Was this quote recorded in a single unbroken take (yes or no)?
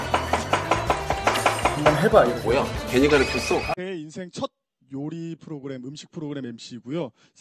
no